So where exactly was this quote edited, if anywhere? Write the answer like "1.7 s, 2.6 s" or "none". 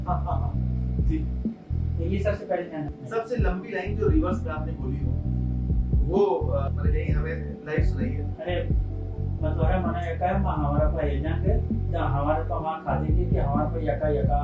2.9 s